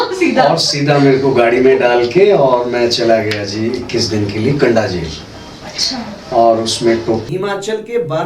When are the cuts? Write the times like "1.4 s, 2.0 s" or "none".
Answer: 7.3 s